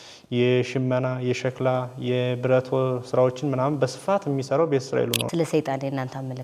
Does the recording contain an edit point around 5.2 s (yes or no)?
yes